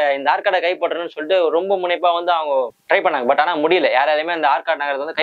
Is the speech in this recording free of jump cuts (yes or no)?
yes